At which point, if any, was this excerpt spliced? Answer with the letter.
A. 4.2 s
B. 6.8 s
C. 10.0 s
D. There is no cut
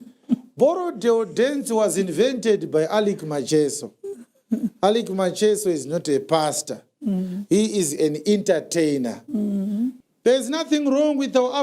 C